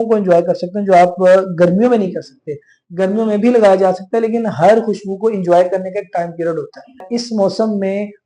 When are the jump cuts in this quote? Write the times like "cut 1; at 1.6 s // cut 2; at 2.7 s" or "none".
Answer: cut 1; at 7.1 s